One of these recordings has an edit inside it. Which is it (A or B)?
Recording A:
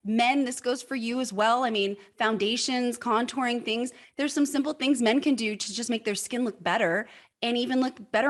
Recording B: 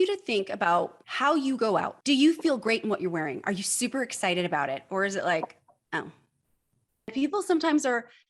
B